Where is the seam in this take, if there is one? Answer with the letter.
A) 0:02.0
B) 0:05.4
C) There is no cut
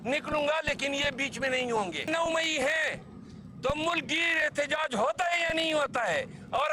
A